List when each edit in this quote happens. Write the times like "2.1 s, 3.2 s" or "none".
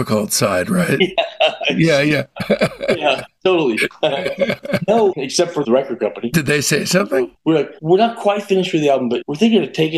5.6 s, 7.4 s, 9.2 s